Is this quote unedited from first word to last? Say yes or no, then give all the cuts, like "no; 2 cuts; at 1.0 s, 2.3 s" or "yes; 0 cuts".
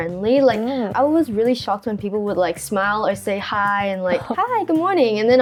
yes; 0 cuts